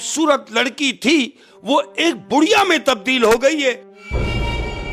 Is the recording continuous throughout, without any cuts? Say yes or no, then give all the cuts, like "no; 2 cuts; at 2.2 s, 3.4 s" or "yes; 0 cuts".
no; 1 cut; at 3.9 s